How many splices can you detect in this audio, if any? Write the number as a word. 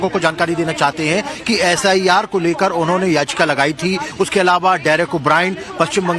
zero